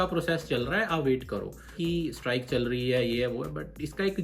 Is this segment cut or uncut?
cut